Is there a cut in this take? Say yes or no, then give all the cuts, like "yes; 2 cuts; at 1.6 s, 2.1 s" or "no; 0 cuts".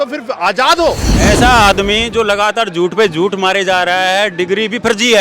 yes; 1 cut; at 1.1 s